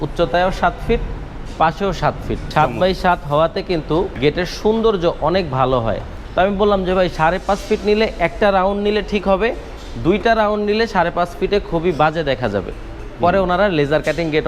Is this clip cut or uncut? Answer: cut